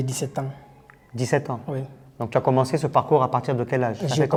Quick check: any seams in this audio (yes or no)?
no